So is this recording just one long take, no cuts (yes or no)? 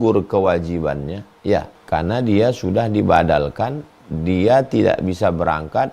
no